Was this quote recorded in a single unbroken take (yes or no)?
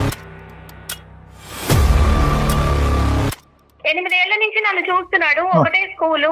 no